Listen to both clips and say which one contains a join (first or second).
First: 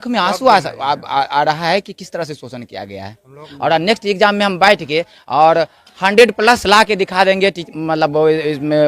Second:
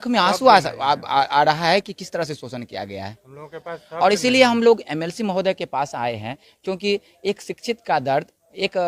first